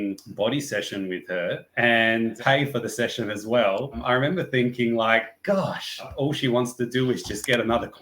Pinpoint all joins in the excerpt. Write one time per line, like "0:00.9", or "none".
0:02.3
0:04.0
0:06.1

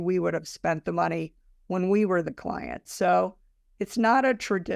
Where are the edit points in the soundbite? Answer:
none

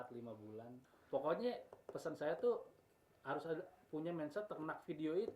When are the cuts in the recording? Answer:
0:00.9

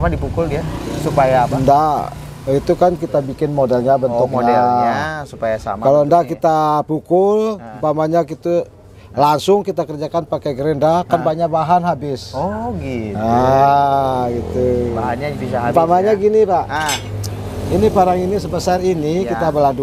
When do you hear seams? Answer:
none

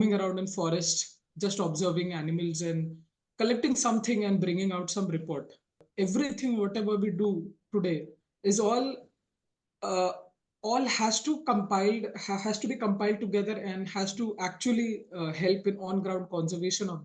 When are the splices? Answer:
0:05.8

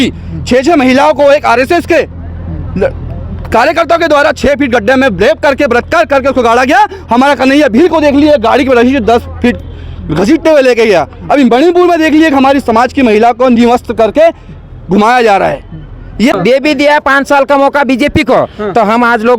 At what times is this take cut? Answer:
0:16.3

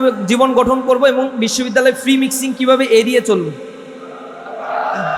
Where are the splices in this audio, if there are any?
none

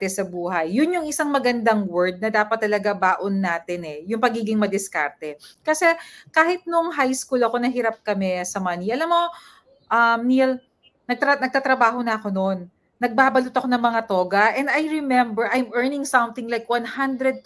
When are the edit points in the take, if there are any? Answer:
none

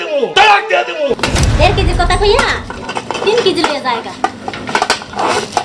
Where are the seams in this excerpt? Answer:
0:01.2

